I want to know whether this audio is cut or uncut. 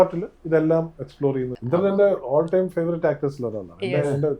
cut